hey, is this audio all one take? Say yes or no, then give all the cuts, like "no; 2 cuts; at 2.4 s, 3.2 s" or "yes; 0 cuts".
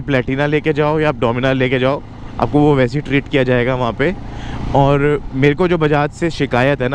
yes; 0 cuts